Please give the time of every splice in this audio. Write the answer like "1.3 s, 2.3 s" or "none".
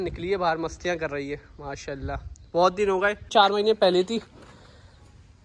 3.2 s